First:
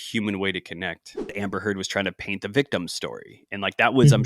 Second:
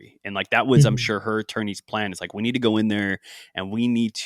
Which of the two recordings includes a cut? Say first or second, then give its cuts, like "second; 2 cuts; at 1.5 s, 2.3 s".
first; 1 cut; at 1.3 s